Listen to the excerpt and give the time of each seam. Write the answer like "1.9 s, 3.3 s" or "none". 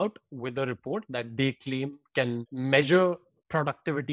2.5 s